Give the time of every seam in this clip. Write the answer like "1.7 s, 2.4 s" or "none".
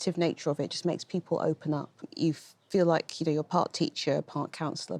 2.1 s